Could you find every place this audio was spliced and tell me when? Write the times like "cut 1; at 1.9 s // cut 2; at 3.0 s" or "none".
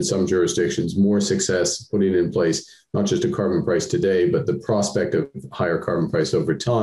none